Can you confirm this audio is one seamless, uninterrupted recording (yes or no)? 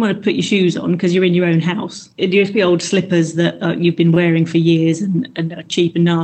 no